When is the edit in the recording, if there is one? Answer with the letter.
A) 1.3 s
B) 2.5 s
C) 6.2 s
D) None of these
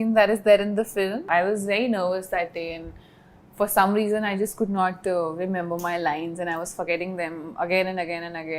A